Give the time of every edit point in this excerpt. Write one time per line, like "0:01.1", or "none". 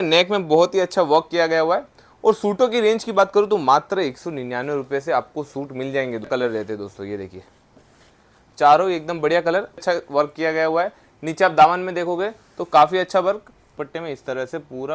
0:06.3
0:09.8
0:13.7